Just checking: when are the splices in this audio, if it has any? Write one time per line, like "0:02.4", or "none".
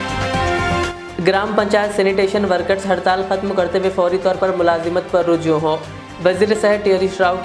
0:01.0